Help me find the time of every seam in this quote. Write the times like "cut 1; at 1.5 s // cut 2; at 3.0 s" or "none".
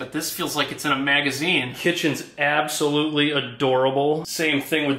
none